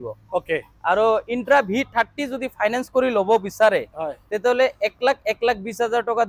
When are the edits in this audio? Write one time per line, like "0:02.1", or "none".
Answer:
none

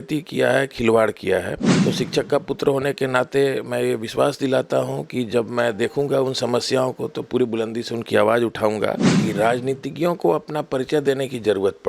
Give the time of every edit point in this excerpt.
0:01.6
0:09.1

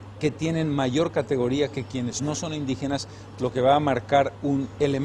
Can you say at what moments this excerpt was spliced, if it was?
0:03.1

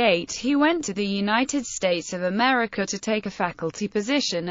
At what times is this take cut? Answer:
0:01.2

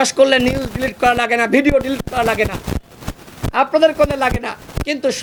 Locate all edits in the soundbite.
none

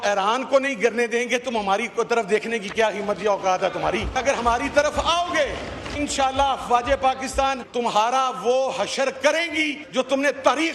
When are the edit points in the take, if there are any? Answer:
0:04.6
0:06.0
0:07.6
0:09.8

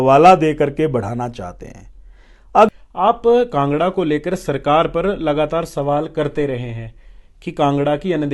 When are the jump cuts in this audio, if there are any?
0:02.7

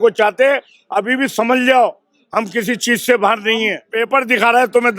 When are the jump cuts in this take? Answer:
0:03.8

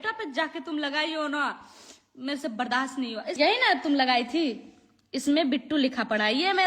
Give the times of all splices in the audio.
0:03.4

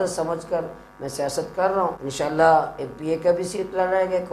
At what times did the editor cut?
0:02.0

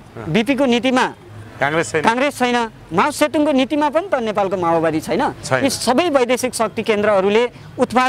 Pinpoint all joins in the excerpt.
none

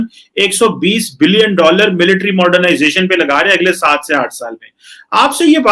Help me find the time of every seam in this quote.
none

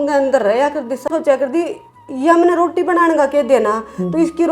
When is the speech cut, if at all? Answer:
0:01.1

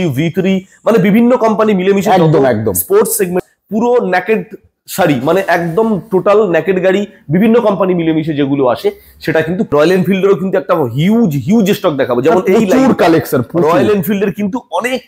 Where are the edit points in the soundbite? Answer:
0:03.4
0:09.7

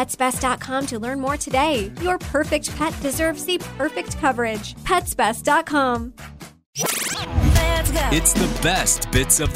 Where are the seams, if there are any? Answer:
0:06.8

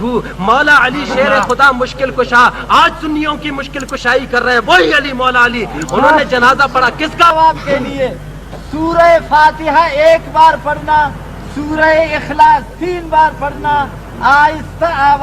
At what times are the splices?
0:07.3

